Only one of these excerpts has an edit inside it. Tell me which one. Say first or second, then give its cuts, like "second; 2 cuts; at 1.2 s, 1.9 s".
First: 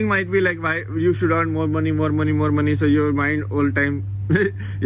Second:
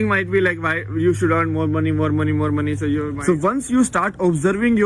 second; 1 cut; at 3.2 s